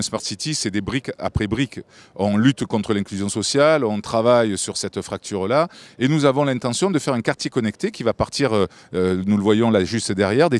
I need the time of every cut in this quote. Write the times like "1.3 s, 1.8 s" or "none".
6.7 s